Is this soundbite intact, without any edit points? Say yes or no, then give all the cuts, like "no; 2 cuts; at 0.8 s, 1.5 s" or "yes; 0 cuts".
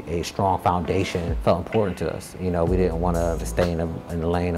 no; 2 cuts; at 1.3 s, 3.5 s